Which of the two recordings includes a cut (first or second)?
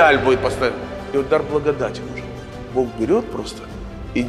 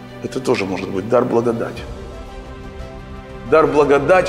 first